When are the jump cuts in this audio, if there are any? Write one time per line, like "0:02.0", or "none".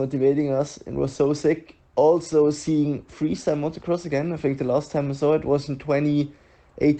none